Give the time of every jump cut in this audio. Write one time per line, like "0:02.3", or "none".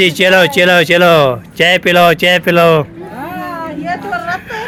none